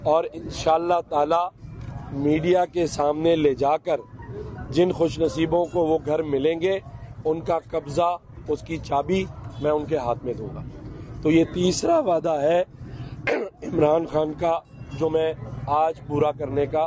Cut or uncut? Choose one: uncut